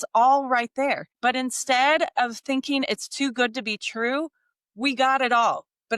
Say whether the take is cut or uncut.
cut